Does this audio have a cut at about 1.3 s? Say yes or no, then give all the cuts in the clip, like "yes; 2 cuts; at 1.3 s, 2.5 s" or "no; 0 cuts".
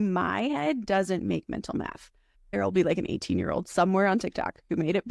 no; 1 cut; at 2.5 s